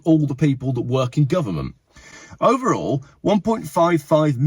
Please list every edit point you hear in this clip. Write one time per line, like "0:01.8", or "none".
none

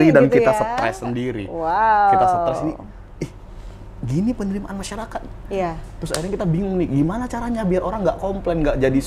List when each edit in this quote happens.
none

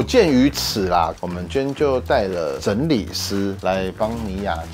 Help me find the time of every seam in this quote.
none

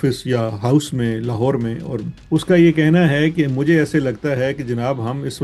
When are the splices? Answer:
0:02.1

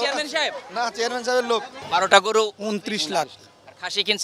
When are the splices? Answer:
0:01.8

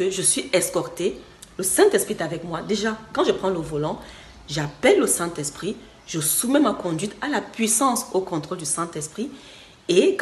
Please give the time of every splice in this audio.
none

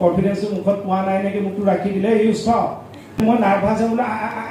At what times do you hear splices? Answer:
0:03.2

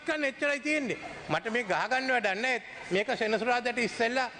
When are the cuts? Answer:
none

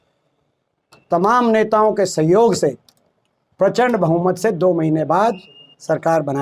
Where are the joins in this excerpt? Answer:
none

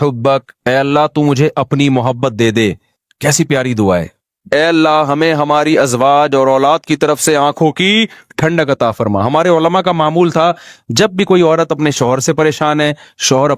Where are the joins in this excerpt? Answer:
0:04.5

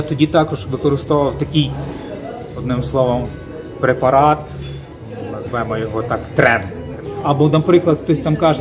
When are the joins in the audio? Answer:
0:06.9

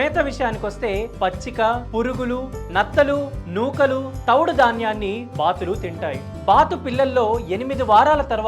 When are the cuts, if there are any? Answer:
0:06.3

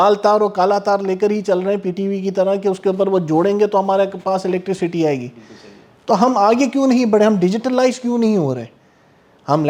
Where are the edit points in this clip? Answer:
none

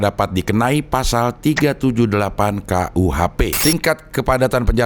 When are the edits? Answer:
0:03.6

